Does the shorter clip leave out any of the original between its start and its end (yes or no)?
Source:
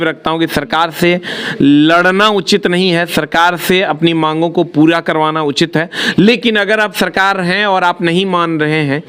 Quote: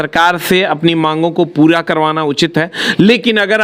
no